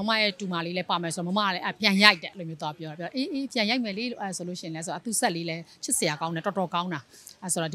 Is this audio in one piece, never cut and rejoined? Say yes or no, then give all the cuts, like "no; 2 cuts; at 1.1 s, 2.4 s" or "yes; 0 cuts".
yes; 0 cuts